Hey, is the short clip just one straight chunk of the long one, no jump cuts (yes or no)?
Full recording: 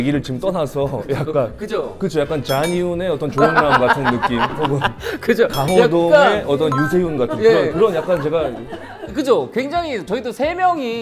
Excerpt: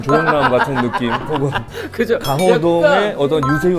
yes